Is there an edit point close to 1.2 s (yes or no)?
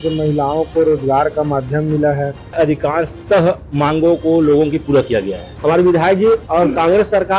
no